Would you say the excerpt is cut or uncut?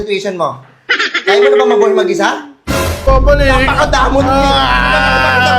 cut